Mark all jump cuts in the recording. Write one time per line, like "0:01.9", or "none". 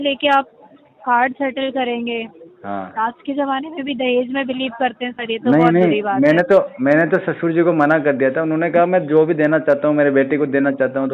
none